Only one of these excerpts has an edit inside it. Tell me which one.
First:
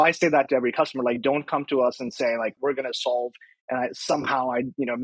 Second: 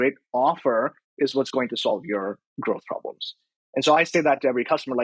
first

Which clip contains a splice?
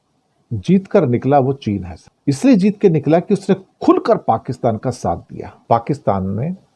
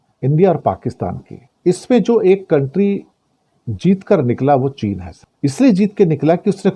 first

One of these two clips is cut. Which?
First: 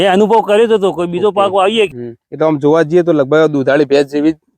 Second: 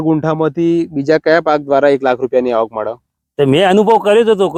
first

